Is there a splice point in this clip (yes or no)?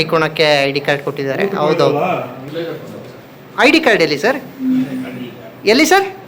yes